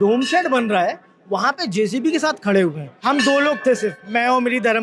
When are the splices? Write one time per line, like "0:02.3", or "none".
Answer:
0:02.9